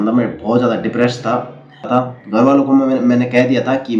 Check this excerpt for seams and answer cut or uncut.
cut